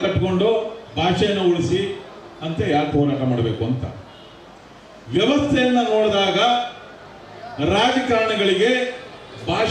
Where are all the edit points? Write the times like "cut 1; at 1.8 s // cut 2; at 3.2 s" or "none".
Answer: none